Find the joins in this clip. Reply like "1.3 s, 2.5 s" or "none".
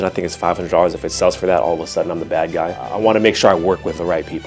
none